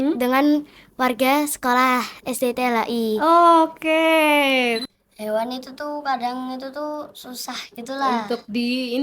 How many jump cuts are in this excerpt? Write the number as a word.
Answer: one